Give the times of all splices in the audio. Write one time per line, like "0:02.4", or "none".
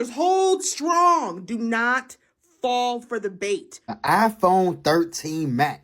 0:03.9